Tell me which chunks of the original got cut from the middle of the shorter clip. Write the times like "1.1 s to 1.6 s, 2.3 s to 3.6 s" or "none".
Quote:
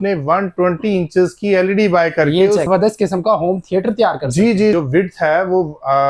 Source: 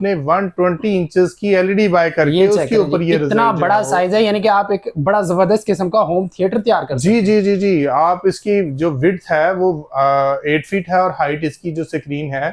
2.7 s to 5.3 s, 7.4 s to 8.8 s